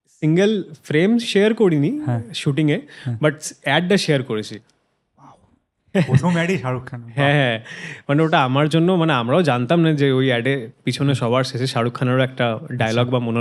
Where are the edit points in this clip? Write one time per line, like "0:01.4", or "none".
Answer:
none

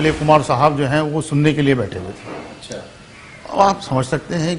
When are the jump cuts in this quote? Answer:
none

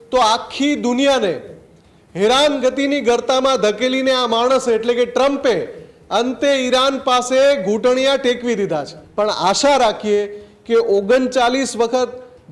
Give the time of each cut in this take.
0:09.0

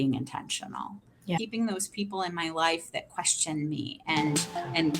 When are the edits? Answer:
0:01.4

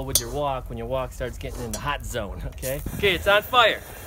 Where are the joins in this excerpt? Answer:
0:02.9

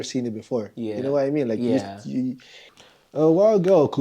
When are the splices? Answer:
0:02.7

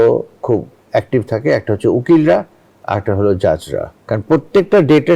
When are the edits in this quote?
0:03.9

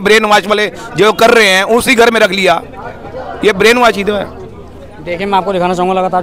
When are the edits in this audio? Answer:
none

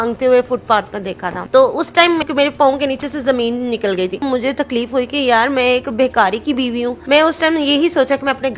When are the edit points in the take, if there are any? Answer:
0:01.3
0:04.2
0:07.0

